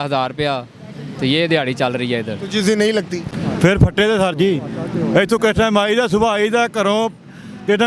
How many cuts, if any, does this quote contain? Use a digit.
1